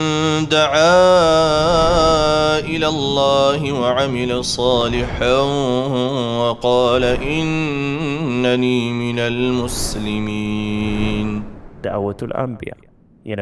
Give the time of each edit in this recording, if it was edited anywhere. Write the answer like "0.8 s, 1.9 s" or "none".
none